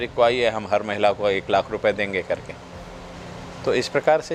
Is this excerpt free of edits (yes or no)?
yes